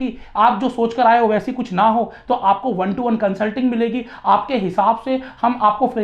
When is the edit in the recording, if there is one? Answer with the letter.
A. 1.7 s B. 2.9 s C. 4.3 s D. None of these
D